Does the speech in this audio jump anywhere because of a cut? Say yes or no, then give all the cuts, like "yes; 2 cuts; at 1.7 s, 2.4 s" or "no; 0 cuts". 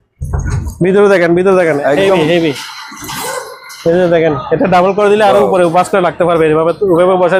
no; 0 cuts